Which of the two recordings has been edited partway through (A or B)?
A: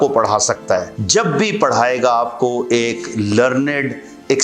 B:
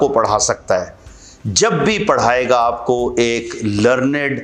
A